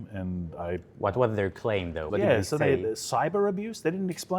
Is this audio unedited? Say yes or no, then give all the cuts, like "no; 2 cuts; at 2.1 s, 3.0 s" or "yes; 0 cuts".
no; 1 cut; at 2.0 s